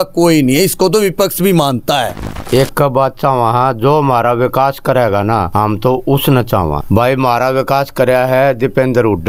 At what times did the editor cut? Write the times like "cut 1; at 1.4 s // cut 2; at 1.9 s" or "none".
cut 1; at 2.3 s // cut 2; at 5.5 s // cut 3; at 6.8 s